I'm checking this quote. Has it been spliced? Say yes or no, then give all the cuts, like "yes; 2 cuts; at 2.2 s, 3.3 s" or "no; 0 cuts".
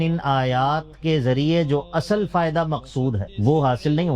yes; 1 cut; at 3.3 s